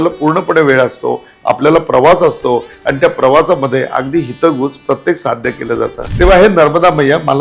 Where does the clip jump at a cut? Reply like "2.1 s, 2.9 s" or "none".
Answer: 6.0 s